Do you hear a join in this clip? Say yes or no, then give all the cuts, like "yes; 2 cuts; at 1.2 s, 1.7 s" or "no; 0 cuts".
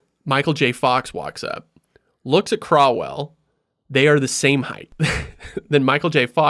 no; 0 cuts